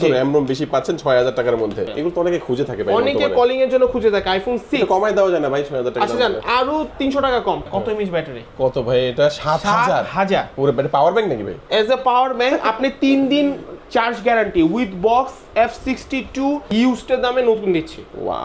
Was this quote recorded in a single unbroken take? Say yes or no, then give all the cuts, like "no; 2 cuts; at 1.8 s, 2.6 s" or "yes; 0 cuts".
no; 3 cuts; at 1.9 s, 7.7 s, 16.6 s